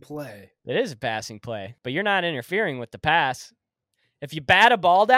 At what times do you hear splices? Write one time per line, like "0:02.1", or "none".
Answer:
0:01.7